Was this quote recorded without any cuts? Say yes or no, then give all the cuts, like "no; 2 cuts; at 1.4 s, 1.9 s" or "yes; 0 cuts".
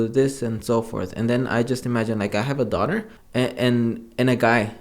no; 1 cut; at 3.2 s